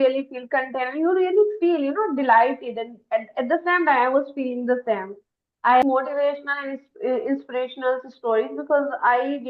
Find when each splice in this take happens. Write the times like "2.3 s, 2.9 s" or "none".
5.8 s